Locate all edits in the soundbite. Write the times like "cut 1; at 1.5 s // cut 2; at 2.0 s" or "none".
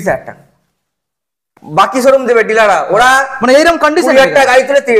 cut 1; at 1.6 s